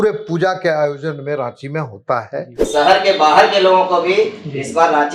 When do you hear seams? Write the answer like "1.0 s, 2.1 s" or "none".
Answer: 2.6 s